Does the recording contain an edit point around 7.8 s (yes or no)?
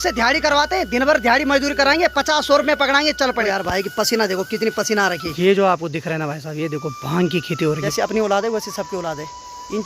yes